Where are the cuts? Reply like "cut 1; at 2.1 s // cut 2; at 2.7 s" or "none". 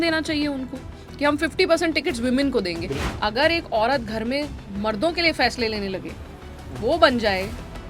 cut 1; at 3.1 s